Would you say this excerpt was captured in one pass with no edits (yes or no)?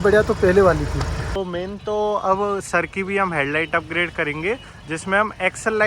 no